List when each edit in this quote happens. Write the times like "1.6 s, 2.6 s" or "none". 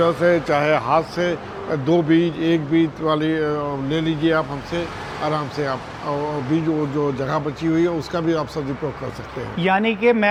none